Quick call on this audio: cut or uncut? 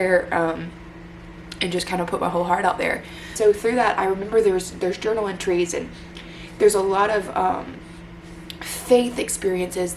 cut